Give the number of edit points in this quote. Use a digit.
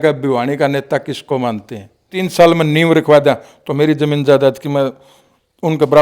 1